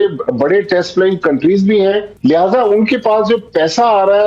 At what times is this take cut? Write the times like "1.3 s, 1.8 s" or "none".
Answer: none